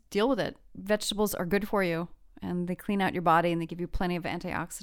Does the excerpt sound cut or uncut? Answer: uncut